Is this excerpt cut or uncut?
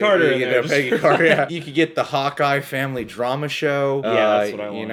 uncut